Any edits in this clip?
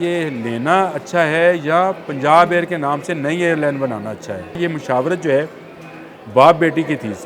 yes; 1 cut; at 4.6 s

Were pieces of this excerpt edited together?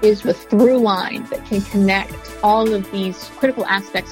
yes; 2 cuts; at 1.2 s, 2.2 s

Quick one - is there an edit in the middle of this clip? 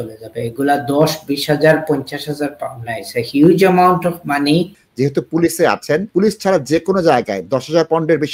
yes; 2 cuts; at 4.8 s, 6.1 s

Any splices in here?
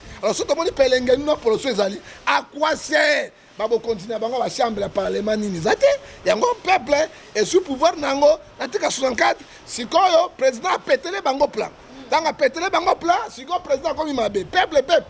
no; 0 cuts

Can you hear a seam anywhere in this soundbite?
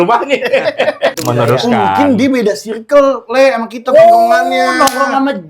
yes; 1 cut; at 1.2 s

